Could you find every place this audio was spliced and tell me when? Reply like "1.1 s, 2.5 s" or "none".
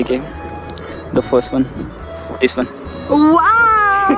none